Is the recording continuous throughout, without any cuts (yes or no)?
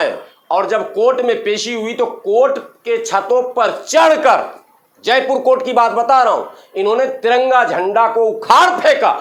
yes